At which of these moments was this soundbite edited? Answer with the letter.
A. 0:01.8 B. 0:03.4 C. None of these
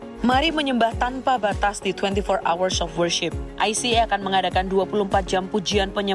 B